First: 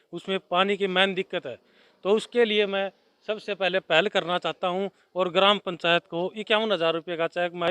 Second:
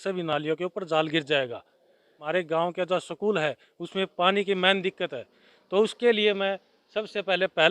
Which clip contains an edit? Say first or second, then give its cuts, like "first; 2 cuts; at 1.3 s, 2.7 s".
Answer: second; 1 cut; at 2.2 s